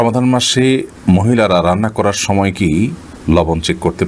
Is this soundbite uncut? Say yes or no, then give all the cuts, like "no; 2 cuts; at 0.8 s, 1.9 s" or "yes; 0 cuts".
yes; 0 cuts